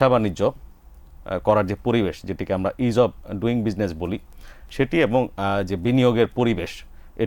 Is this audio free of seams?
yes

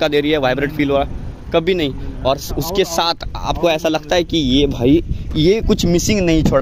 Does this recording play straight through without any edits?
yes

